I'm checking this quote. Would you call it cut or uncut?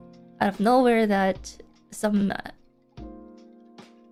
uncut